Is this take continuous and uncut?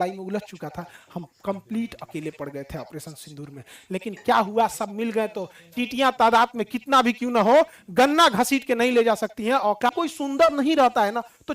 no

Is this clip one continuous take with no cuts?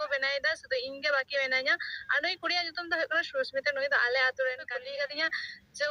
no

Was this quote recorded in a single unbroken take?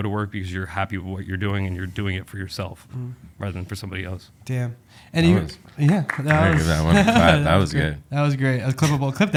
yes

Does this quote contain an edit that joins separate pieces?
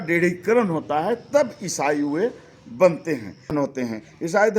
yes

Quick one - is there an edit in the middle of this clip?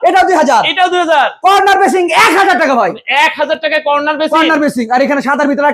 no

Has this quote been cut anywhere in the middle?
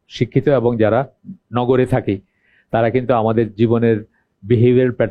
no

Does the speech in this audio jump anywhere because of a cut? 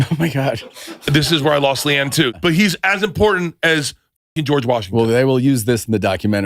yes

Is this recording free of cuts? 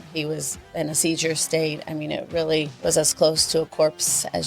no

